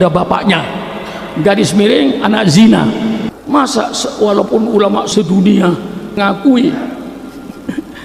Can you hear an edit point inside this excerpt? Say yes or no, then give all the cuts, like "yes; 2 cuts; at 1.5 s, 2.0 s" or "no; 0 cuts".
yes; 3 cuts; at 3.3 s, 5.1 s, 6.2 s